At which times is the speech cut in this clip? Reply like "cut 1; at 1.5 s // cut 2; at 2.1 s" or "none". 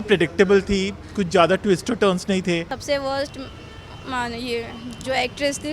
cut 1; at 2.7 s